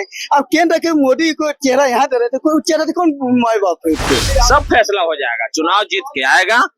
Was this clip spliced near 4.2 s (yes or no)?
yes